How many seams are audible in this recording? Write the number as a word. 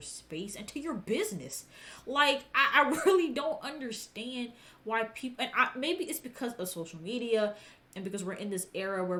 zero